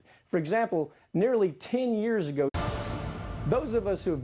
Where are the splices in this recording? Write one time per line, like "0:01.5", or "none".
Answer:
none